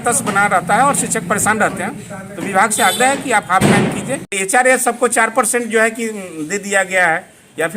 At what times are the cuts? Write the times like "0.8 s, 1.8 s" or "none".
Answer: 4.3 s